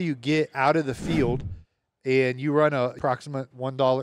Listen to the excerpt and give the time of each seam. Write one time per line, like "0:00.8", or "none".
0:02.9